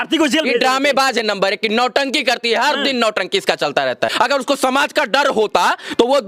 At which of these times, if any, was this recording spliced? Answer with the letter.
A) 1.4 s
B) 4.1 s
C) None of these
B